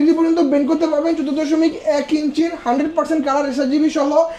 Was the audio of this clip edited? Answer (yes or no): no